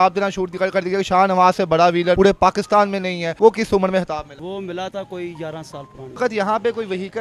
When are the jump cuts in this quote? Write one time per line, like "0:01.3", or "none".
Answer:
0:02.2
0:03.3
0:04.3
0:06.2